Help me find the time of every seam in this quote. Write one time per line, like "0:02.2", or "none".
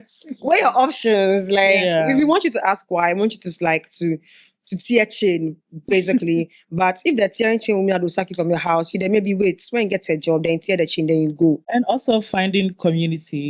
0:11.6